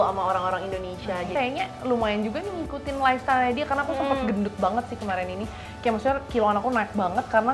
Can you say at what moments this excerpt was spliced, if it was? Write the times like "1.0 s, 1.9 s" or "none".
1.3 s